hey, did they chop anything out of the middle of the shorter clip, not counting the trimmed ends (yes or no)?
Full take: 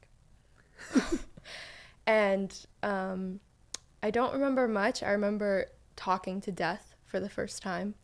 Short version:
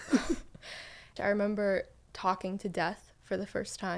yes